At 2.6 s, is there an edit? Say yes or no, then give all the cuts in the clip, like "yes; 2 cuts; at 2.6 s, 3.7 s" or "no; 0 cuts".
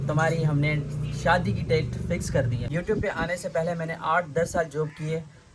yes; 1 cut; at 2.6 s